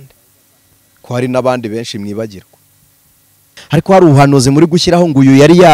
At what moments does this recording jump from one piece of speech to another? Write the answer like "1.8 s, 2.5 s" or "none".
3.5 s